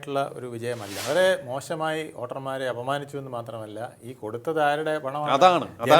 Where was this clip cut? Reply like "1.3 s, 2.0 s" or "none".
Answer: 0.9 s